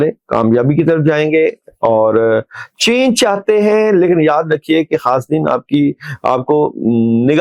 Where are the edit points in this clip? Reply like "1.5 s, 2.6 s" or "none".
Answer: none